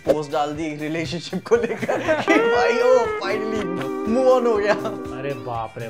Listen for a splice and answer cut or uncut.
cut